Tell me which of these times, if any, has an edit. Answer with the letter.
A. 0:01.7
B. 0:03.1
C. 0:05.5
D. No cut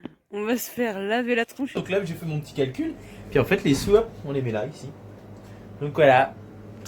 A